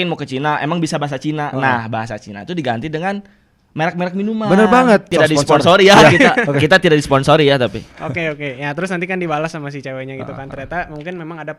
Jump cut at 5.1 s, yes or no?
yes